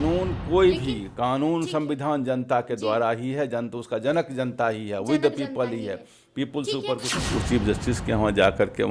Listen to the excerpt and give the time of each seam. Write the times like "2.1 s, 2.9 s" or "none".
7.1 s